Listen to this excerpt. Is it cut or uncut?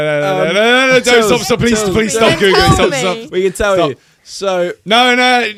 uncut